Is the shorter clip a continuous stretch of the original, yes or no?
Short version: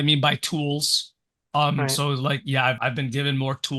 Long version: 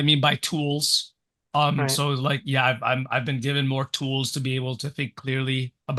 no